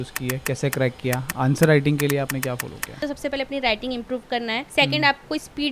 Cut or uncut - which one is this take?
cut